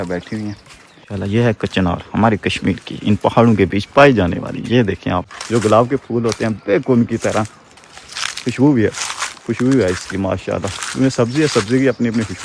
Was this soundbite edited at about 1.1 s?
yes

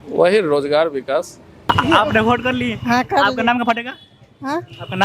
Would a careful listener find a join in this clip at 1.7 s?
yes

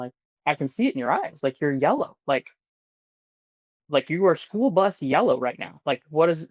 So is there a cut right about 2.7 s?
no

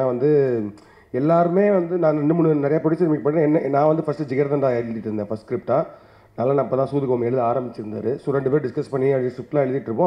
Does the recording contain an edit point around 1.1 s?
no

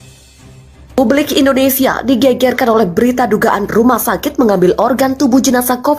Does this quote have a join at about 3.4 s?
no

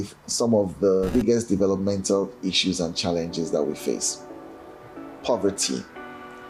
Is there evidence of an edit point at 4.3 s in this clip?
no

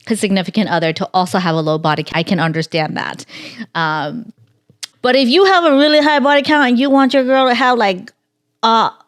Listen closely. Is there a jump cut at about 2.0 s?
yes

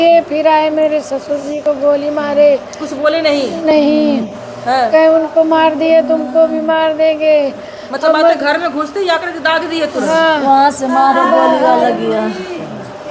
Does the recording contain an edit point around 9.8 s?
no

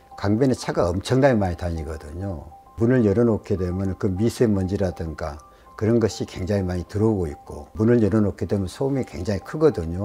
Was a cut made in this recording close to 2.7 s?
yes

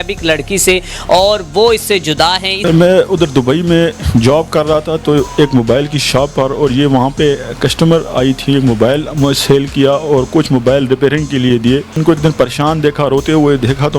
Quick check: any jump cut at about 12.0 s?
yes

